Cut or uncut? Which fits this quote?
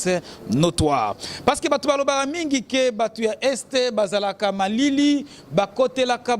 cut